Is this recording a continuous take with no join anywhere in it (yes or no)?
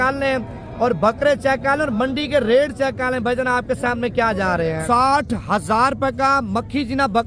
no